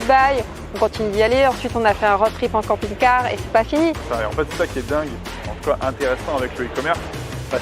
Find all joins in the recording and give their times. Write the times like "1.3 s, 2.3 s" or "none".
4.0 s